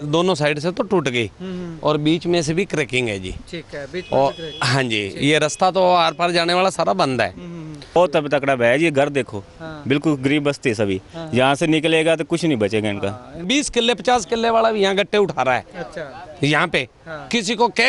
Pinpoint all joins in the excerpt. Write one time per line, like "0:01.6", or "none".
0:08.0
0:13.5